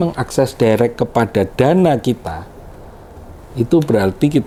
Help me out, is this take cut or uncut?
uncut